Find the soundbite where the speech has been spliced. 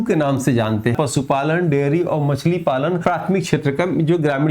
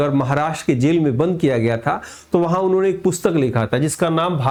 first; 2 cuts; at 0.9 s, 3.0 s

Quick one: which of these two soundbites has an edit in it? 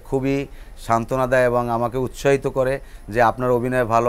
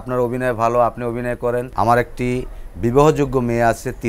second; 1 cut; at 1.7 s

